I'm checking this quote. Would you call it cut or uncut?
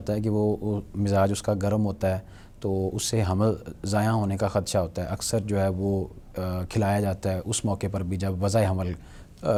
uncut